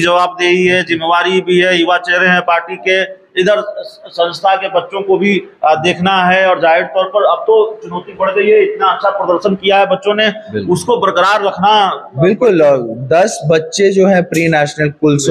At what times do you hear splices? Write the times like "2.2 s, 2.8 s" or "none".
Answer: none